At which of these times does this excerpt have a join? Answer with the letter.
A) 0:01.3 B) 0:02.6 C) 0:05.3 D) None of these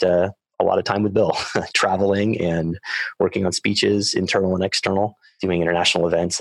C